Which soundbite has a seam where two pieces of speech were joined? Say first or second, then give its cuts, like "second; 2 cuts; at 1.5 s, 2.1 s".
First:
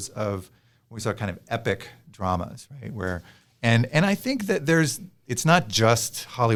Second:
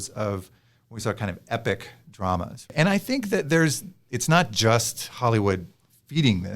second; 1 cut; at 2.7 s